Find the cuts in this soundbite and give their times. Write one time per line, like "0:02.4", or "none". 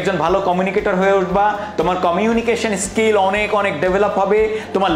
none